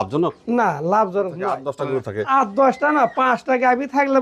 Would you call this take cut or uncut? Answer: cut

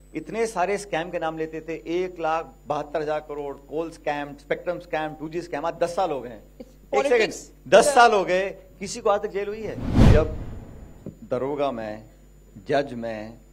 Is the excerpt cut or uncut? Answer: cut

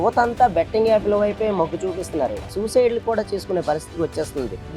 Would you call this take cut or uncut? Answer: cut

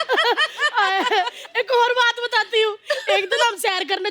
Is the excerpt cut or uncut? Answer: uncut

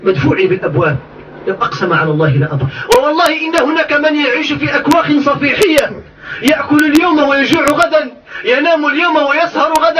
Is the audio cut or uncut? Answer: cut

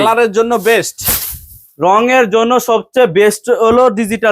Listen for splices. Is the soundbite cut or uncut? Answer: uncut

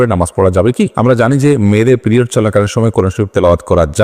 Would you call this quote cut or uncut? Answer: cut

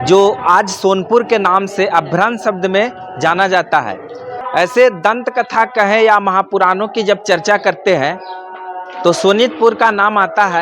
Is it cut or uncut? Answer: cut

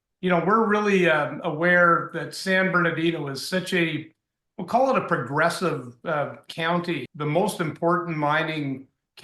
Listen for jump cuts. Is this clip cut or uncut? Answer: cut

